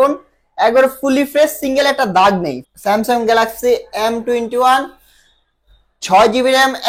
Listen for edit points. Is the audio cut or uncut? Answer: cut